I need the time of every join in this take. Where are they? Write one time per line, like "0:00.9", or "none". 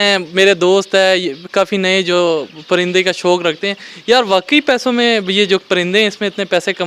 none

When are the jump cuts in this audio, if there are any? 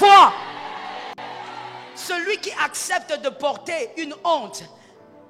0:01.9

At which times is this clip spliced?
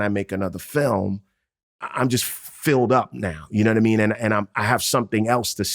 0:01.6

